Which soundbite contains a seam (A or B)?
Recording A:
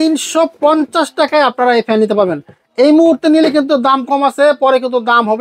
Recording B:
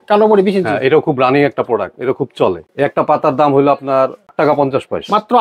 B